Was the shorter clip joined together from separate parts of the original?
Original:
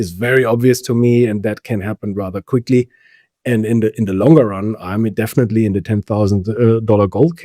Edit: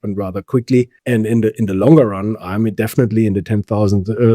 yes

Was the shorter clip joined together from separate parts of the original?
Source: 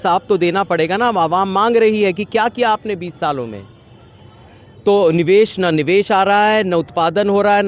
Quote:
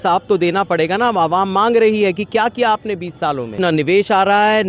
yes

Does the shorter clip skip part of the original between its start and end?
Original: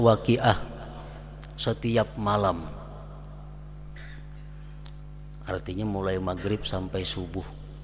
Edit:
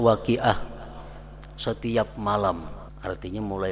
yes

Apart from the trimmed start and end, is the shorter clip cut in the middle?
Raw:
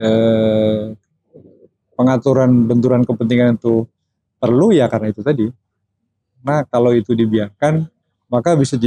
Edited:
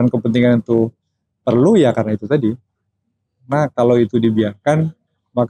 no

